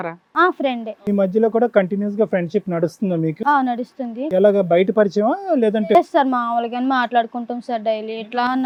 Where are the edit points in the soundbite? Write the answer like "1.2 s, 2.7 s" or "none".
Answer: none

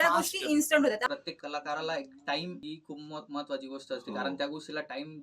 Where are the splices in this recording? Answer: 1.1 s, 2.6 s

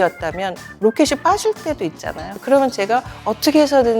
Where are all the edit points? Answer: 2.4 s

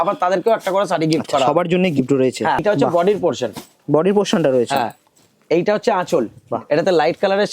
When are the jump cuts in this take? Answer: 2.6 s, 6.4 s

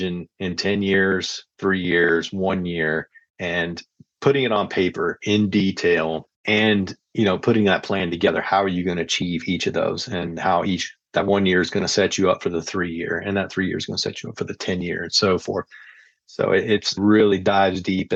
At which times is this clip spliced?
none

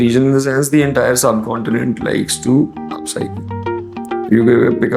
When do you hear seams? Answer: none

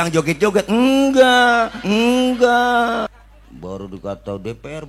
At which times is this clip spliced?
3.1 s

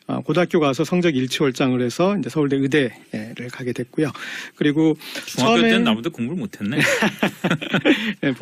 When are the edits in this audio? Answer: 2.2 s

